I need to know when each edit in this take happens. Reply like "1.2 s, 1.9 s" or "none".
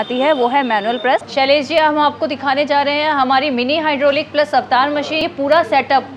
1.3 s, 5.2 s